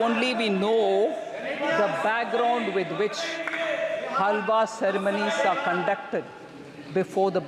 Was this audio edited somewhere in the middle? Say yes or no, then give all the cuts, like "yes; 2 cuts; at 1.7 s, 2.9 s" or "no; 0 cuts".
no; 0 cuts